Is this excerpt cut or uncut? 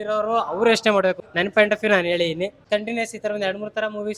cut